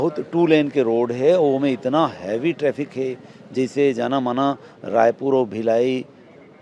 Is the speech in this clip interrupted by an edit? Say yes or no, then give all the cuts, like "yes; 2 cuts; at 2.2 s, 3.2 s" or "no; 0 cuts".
no; 0 cuts